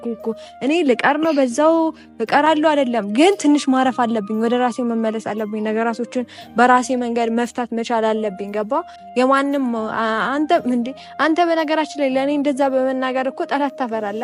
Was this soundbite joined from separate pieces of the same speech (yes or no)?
no